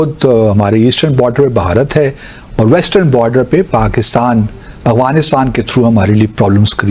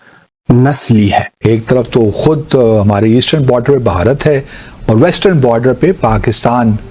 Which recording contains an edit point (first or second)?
second